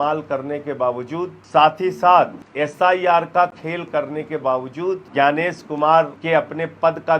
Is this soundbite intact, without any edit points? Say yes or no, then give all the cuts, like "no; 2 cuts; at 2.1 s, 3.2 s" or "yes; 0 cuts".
no; 4 cuts; at 1.4 s, 2.4 s, 5.1 s, 6.2 s